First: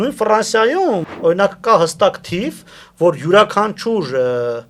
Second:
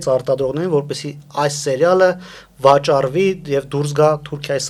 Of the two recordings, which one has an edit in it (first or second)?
first